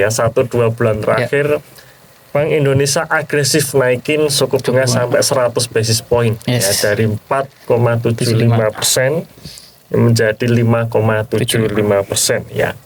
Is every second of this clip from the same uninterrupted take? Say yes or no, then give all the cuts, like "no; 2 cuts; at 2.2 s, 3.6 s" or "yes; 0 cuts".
yes; 0 cuts